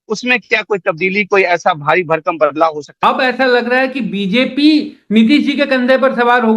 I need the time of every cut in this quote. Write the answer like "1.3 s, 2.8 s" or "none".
2.9 s